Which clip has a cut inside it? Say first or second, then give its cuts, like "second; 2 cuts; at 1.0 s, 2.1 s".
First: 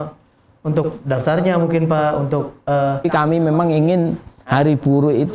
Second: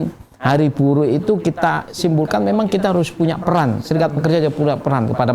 first; 1 cut; at 3.0 s